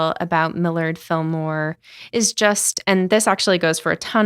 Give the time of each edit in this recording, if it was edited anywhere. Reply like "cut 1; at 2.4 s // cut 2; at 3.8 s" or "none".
none

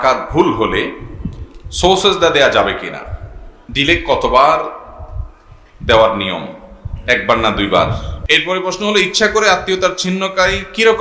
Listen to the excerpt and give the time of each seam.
cut 1; at 8.1 s

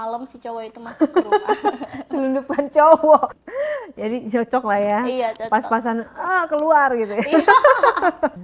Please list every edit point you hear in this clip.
cut 1; at 3.4 s

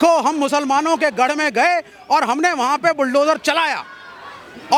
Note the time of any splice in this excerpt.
none

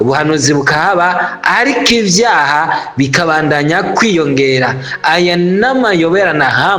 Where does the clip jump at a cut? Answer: none

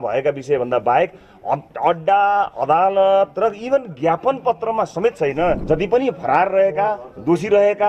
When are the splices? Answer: cut 1; at 5.6 s

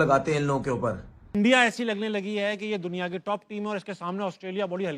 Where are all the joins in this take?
cut 1; at 1.1 s

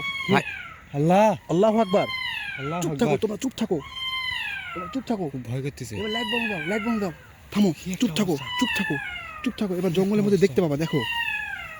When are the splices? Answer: none

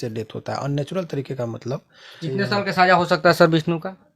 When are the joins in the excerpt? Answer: cut 1; at 2.2 s

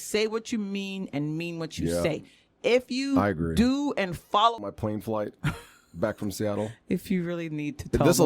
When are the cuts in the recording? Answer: cut 1; at 4.6 s

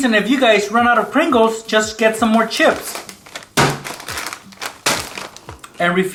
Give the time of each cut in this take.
none

